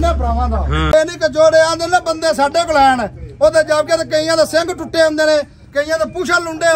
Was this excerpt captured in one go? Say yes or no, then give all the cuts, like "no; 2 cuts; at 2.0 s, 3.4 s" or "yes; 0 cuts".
no; 1 cut; at 0.9 s